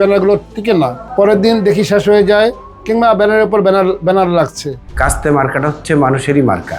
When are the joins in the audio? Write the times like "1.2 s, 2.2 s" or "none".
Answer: 1.0 s, 4.9 s